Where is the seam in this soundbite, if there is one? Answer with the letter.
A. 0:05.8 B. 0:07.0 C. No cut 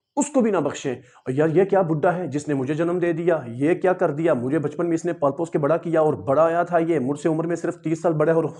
C